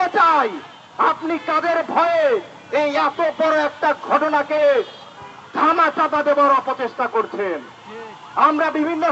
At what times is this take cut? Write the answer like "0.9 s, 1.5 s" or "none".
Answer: none